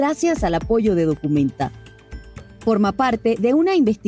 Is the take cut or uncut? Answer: cut